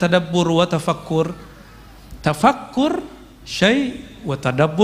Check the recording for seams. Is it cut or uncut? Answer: uncut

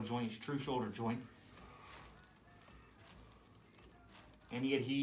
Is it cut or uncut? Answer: uncut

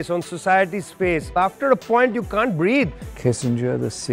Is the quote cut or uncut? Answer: cut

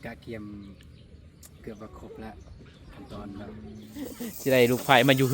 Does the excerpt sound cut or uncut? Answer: cut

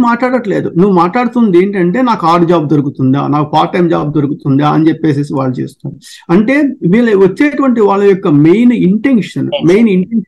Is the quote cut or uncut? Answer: uncut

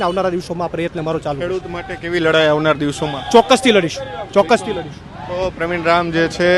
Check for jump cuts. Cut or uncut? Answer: uncut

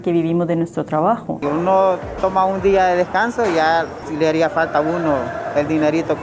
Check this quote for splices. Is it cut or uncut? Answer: cut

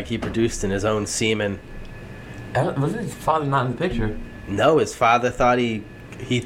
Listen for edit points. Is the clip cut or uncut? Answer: uncut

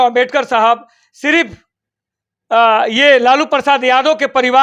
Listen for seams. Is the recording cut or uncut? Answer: uncut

